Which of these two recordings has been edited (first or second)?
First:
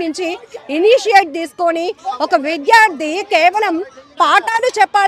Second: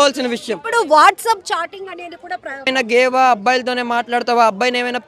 second